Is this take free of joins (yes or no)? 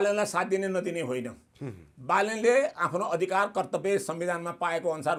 yes